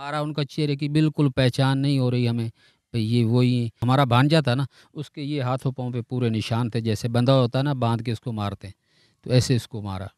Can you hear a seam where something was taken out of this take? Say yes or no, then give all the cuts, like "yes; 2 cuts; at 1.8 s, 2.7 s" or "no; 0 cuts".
yes; 1 cut; at 3.7 s